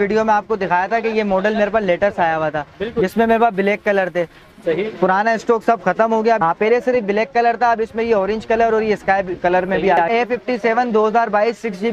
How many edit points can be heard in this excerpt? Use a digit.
2